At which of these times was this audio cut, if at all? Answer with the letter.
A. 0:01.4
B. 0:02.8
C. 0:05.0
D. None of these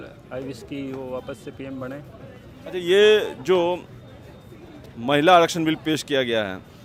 D